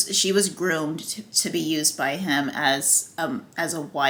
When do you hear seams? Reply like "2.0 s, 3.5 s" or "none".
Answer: none